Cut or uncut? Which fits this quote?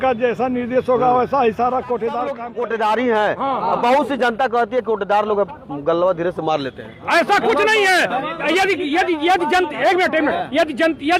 cut